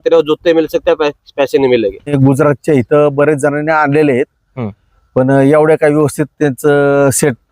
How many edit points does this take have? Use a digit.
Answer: 1